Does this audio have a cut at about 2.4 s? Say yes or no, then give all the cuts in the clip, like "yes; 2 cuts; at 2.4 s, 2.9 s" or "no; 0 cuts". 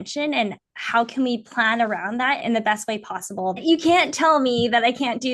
yes; 2 cuts; at 2.4 s, 3.6 s